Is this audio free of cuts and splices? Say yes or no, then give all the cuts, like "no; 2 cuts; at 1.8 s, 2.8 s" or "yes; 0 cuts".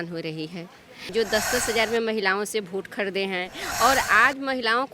no; 1 cut; at 1.0 s